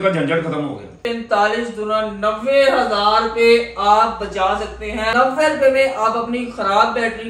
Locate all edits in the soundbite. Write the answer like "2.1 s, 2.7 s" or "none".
1.0 s, 5.1 s